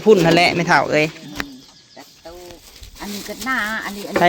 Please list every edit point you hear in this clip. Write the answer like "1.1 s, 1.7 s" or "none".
2.6 s